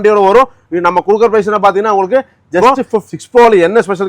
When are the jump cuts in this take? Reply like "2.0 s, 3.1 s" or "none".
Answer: 2.6 s